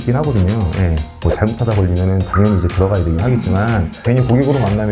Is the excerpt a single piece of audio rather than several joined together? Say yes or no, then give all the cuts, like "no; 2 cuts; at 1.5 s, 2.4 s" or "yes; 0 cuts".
no; 2 cuts; at 1.2 s, 4.0 s